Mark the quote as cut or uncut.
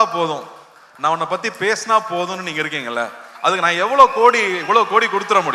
uncut